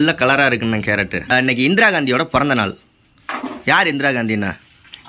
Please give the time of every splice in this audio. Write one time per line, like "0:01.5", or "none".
0:01.3

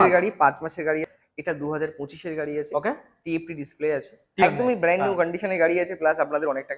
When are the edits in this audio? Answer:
0:01.0
0:04.4

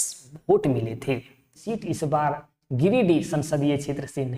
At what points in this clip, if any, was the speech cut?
0:01.6

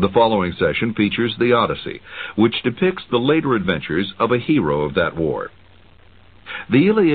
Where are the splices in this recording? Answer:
0:01.8

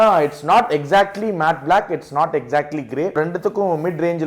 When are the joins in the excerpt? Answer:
0:03.2

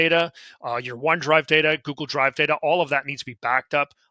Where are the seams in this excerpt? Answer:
none

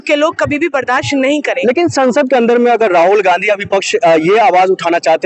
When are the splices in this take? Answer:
none

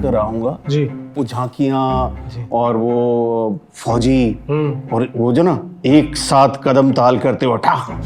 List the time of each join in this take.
none

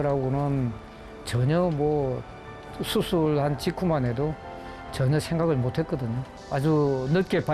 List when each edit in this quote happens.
0:06.4

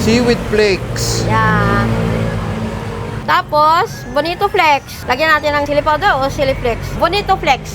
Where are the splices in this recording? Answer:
0:05.0
0:06.9

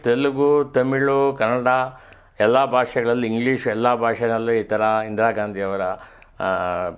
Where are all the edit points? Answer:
none

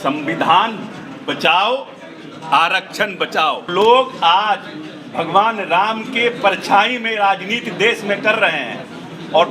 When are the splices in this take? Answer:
0:03.7

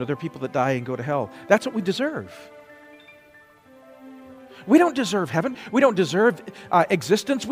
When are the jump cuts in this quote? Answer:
0:05.5

